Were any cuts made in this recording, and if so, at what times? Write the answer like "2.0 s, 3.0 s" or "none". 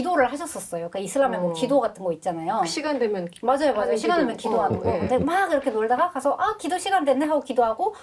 none